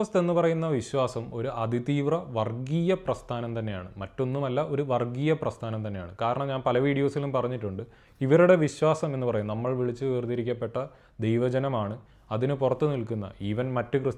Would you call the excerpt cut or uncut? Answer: uncut